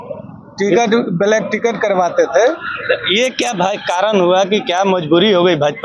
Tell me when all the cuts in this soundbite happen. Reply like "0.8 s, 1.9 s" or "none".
none

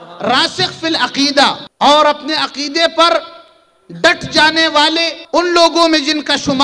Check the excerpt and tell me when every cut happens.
1.7 s, 5.2 s

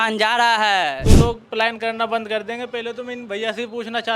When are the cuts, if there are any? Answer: 1.0 s

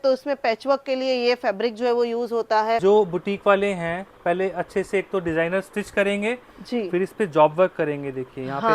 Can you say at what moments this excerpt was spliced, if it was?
2.8 s

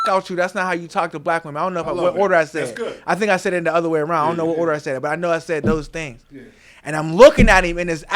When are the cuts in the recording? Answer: none

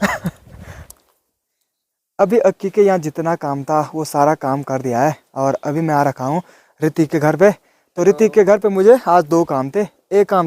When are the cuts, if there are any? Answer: 2.0 s

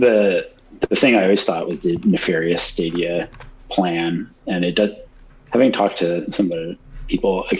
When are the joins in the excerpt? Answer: none

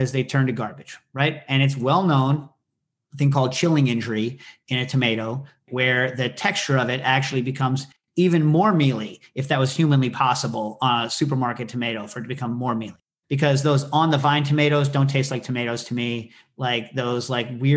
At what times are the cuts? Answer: 13.0 s

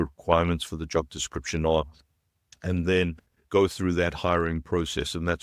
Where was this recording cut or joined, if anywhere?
none

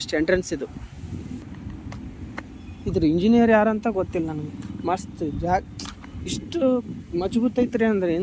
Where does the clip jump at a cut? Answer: 1.5 s

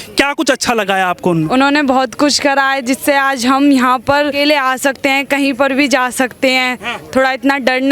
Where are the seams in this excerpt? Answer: 1.5 s, 4.3 s

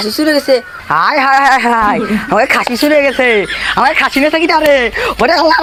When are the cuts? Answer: none

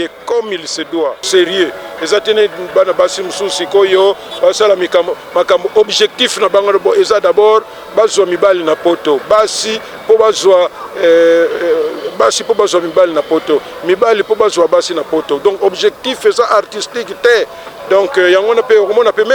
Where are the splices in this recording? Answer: 1.2 s

